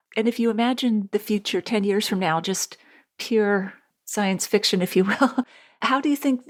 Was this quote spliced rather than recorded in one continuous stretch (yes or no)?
no